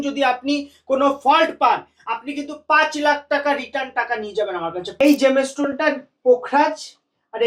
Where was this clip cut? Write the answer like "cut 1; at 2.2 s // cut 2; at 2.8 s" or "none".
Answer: cut 1; at 5.0 s